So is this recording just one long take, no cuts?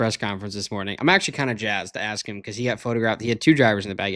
yes; 0 cuts

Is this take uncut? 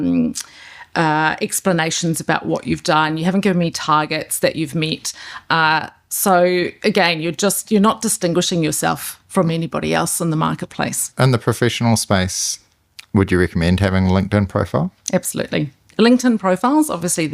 no; 2 cuts; at 11.0 s, 15.9 s

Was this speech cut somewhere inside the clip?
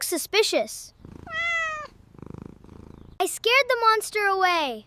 yes; 1 cut; at 3.0 s

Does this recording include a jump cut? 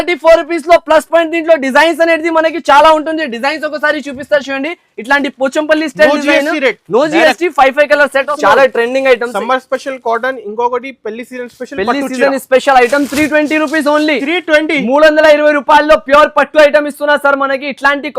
yes; 1 cut; at 8.3 s

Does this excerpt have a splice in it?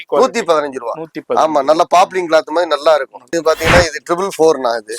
yes; 1 cut; at 3.3 s

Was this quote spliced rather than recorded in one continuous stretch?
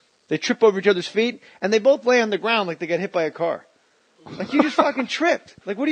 yes; 1 cut; at 2.8 s

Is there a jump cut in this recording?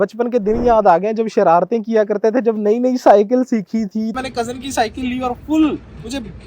yes; 1 cut; at 4.1 s

